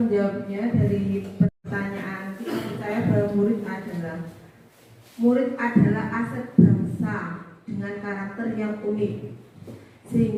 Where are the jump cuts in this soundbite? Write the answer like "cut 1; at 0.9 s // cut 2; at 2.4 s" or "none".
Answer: none